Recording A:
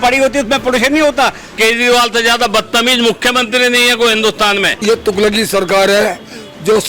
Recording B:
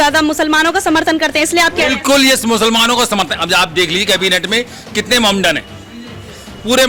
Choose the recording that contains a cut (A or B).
A